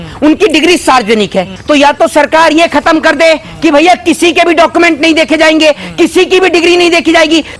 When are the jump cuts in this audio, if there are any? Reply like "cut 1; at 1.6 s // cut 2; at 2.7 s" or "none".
cut 1; at 1.5 s